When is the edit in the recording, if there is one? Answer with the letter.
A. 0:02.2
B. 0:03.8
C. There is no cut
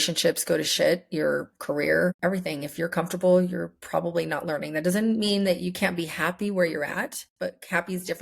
A